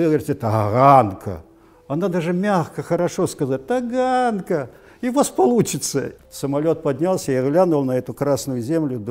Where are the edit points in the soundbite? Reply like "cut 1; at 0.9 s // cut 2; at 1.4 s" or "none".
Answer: cut 1; at 6.1 s